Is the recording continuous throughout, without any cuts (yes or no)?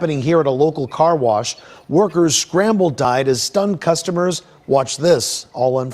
no